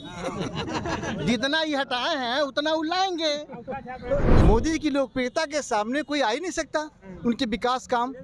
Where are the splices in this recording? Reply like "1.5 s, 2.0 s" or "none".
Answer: 4.3 s